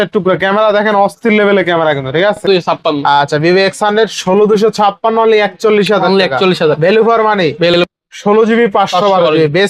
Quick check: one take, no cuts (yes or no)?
no